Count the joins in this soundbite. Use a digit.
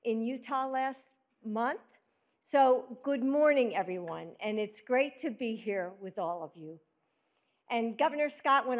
2